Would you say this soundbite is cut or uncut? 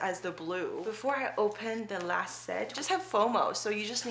cut